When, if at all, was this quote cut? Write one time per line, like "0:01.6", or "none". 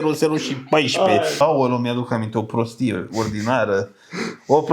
0:01.3

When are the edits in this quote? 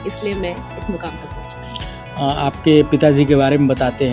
none

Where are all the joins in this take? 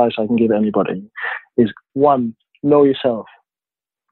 0:01.8

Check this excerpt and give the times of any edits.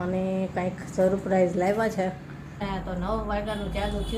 0:02.6

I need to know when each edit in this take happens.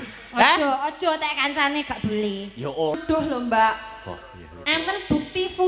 0:03.0

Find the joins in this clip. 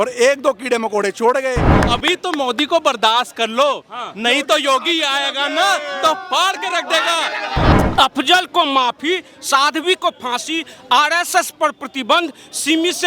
0:01.7
0:07.7

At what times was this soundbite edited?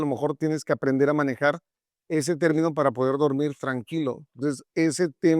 0:04.4

